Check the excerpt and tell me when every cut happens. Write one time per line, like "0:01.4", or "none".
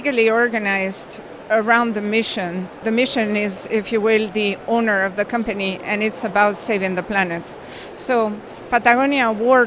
0:02.7